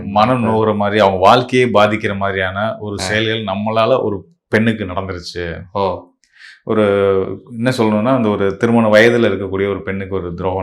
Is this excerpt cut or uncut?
uncut